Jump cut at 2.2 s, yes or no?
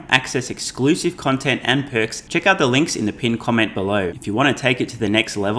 yes